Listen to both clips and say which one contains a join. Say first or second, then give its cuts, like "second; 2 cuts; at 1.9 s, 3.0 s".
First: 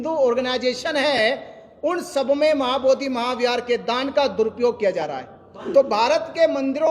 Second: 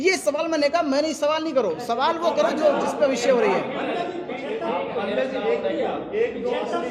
first; 1 cut; at 5.6 s